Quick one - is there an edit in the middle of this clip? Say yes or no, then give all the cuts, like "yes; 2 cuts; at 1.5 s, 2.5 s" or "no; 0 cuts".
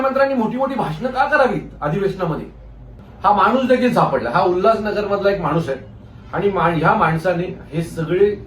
yes; 1 cut; at 3.0 s